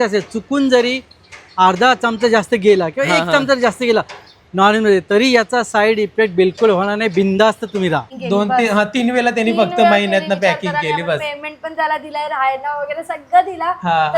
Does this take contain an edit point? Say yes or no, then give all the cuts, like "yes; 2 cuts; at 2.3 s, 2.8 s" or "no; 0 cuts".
yes; 1 cut; at 8.1 s